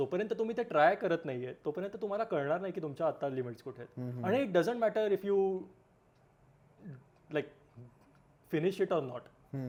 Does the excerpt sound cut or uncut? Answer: uncut